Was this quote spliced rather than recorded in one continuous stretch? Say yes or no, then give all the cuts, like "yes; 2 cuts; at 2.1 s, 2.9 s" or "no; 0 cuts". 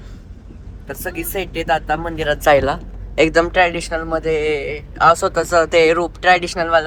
no; 0 cuts